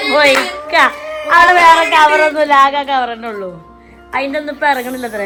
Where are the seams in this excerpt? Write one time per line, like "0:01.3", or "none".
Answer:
none